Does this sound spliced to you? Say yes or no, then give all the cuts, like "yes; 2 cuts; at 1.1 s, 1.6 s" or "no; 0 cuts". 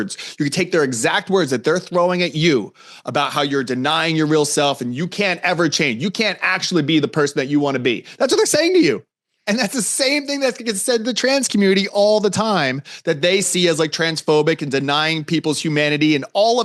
no; 0 cuts